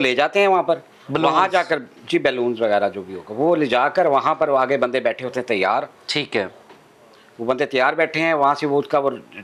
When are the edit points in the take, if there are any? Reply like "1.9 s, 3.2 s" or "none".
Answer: none

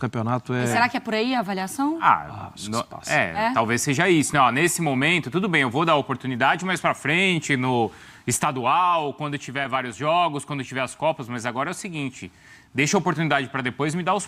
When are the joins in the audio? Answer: none

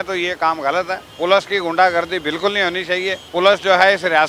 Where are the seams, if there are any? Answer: 1.0 s, 3.2 s

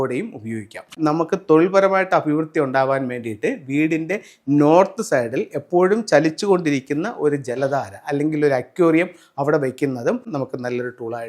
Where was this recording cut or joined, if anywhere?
0.9 s, 10.3 s

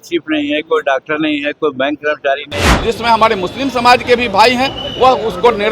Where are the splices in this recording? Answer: 2.6 s

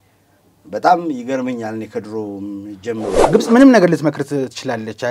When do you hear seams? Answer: 3.3 s

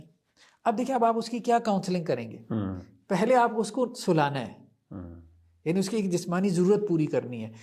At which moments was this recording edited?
none

